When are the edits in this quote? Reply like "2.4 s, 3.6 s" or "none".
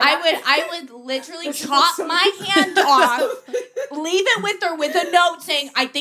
none